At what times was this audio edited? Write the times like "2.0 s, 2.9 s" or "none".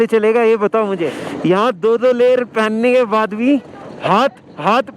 1.2 s